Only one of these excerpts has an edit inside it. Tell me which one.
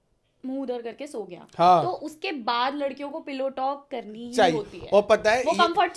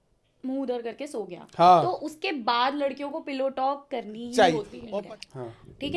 second; 1 cut; at 4.8 s

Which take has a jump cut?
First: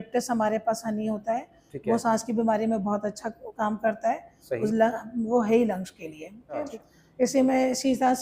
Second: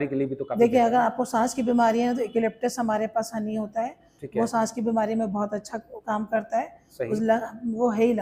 first; 1 cut; at 6.6 s

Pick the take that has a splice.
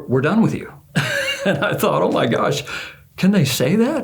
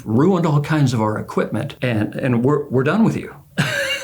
second; 1 cut; at 1.7 s

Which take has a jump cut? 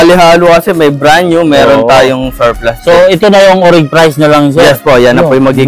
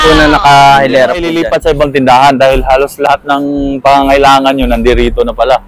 second; 1 cut; at 1.4 s

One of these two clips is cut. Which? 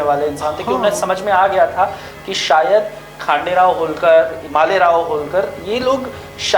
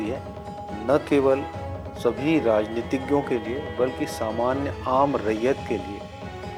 first; 1 cut; at 4.4 s

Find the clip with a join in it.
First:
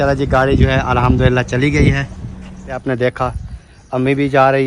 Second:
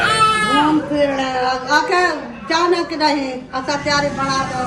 first; 1 cut; at 2.8 s

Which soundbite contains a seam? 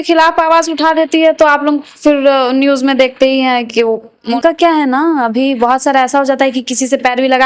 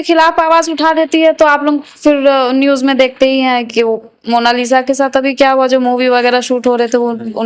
first; 1 cut; at 4.3 s

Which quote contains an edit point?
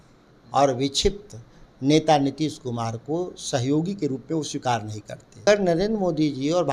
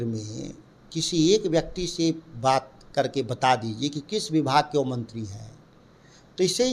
first; 1 cut; at 5.5 s

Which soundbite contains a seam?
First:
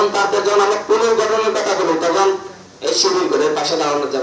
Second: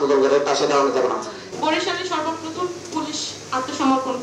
second; 1 cut; at 1.4 s

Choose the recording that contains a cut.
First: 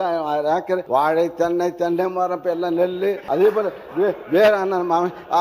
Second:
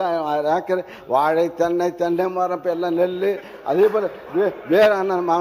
first; 2 cuts; at 0.8 s, 3.2 s

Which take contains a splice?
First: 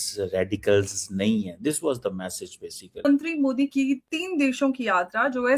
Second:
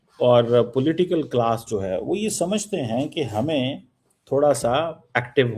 first; 1 cut; at 3.0 s

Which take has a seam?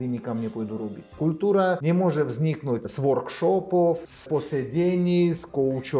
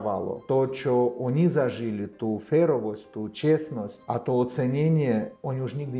first; 4 cuts; at 1.1 s, 1.8 s, 2.9 s, 4.2 s

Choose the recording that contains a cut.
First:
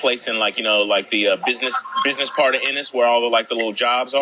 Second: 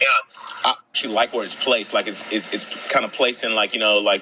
second; 1 cut; at 1.0 s

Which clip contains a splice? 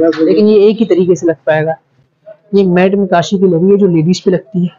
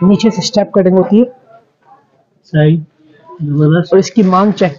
first; 1 cut; at 1.9 s

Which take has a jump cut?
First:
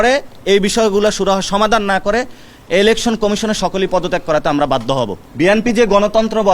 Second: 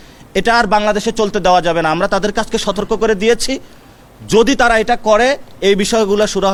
first; 1 cut; at 5.2 s

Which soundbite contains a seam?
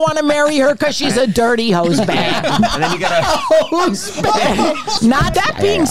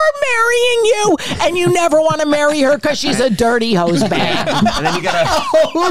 first; 1 cut; at 5.0 s

